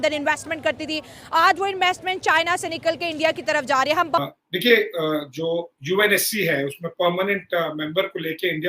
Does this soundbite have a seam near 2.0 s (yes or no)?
no